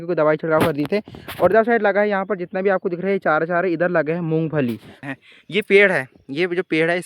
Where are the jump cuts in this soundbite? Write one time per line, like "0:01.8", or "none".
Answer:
0:05.0